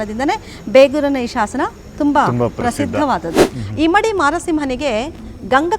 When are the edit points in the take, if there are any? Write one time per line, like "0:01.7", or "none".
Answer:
0:03.5